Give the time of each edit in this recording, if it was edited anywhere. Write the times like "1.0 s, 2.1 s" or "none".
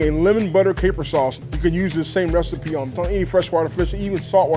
1.4 s, 2.9 s